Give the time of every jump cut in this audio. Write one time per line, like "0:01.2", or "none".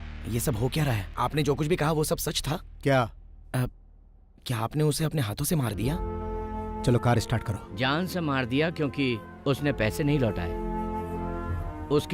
0:01.1